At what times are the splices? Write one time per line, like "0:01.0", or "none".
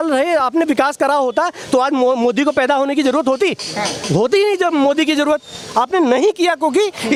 none